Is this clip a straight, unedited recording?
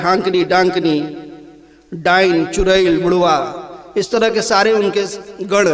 yes; 0 cuts

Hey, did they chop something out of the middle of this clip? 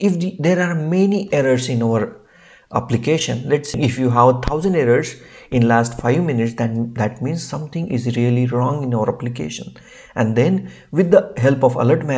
no; 0 cuts

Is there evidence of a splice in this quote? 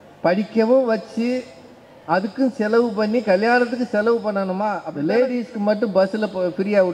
yes; 1 cut; at 4.8 s

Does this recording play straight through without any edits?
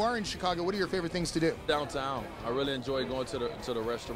no; 1 cut; at 1.6 s

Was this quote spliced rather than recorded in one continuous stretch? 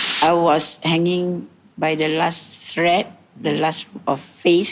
no; 0 cuts

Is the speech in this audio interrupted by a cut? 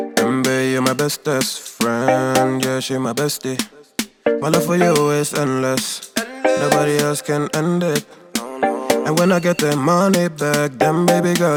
no; 0 cuts

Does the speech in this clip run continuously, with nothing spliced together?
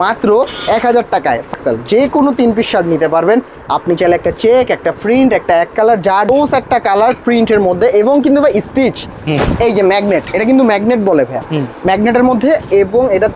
no; 2 cuts; at 1.5 s, 6.3 s

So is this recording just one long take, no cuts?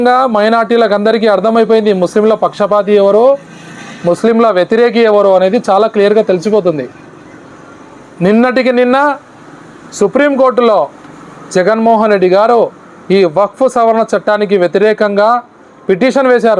yes; 0 cuts

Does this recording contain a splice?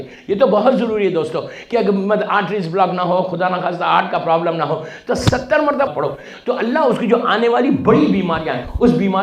yes; 1 cut; at 5.9 s

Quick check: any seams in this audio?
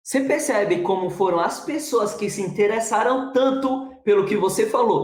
no; 0 cuts

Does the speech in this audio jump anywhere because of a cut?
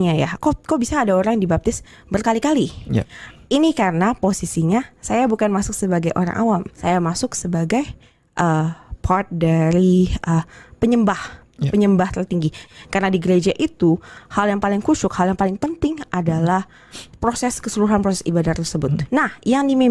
yes; 1 cut; at 6.7 s

